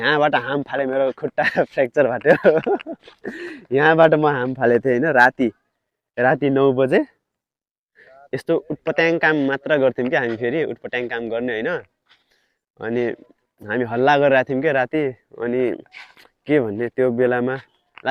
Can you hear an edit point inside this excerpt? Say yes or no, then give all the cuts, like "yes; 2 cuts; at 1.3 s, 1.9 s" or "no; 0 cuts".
no; 0 cuts